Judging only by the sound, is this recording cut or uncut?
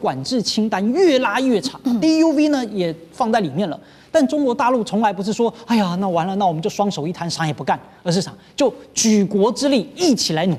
uncut